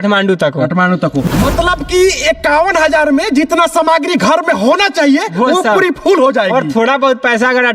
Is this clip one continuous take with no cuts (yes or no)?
no